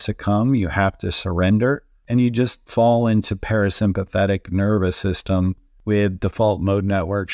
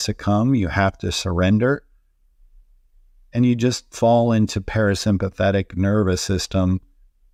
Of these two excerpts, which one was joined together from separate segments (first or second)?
first